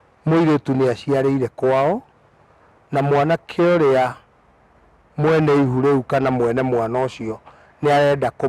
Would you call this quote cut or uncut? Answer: uncut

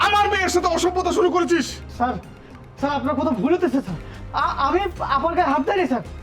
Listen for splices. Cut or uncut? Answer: uncut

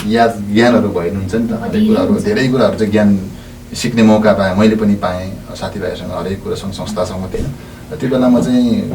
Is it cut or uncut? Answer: cut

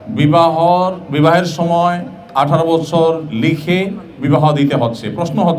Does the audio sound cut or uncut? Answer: uncut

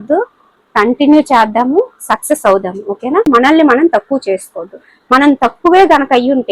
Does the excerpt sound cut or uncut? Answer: cut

